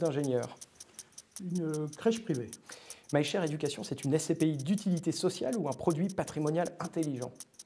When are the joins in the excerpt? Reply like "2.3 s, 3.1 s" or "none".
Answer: none